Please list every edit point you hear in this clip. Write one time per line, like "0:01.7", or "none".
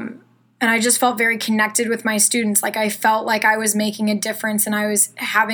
none